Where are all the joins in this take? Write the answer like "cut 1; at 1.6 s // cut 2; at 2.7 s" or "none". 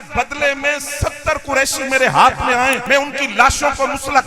cut 1; at 2.8 s